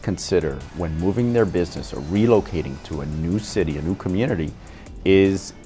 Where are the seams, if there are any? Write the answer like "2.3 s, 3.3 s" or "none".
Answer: none

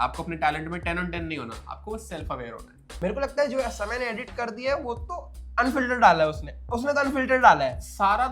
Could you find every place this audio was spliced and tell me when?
2.8 s

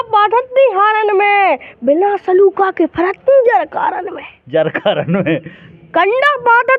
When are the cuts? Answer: none

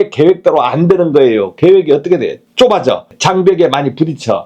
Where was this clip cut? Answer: 2.4 s, 3.1 s

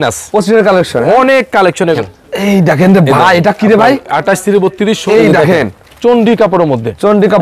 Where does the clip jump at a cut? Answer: 2.0 s, 5.0 s

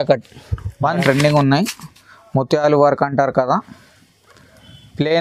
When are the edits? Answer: 0.9 s

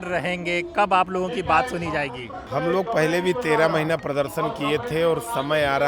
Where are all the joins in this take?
2.3 s

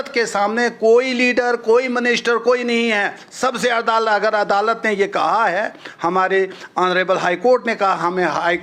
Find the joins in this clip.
none

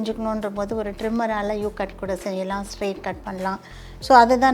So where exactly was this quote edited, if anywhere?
none

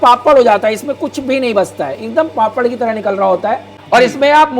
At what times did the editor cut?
3.7 s

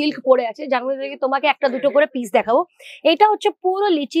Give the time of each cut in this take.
none

